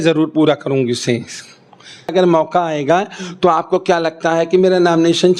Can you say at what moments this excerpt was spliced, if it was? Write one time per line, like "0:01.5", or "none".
0:02.1